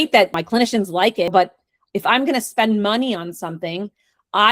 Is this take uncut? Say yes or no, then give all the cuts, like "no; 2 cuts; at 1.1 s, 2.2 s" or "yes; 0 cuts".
no; 1 cut; at 1.3 s